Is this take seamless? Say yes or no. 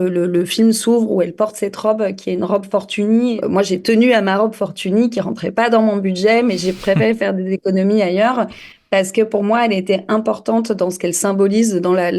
no